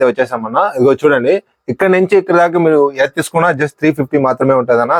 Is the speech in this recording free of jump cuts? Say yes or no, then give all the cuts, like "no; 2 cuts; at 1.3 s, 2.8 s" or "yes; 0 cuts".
yes; 0 cuts